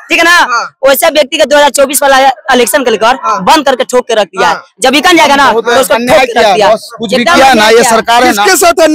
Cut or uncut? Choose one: uncut